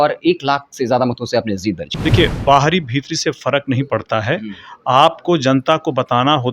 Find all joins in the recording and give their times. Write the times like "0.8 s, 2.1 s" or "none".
1.9 s